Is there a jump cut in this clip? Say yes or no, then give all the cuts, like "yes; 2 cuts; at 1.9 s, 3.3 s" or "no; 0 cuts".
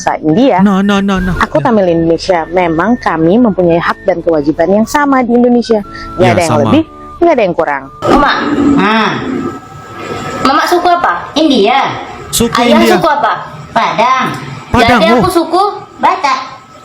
yes; 1 cut; at 8.0 s